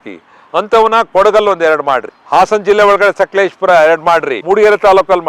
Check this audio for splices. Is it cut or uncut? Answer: cut